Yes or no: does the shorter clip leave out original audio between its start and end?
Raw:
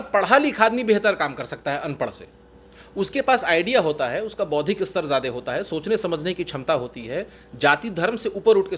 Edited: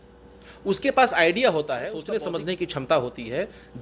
yes